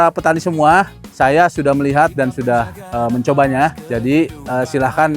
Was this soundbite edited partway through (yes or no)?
yes